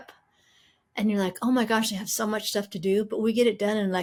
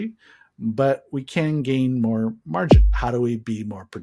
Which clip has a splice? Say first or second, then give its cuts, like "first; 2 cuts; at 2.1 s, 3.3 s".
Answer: second; 1 cut; at 2.8 s